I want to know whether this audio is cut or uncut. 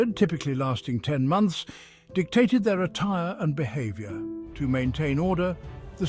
cut